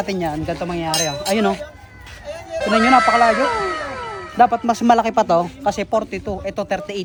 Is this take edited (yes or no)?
no